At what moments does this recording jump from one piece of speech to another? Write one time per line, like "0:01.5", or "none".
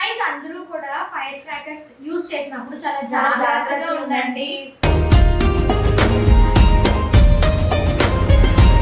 none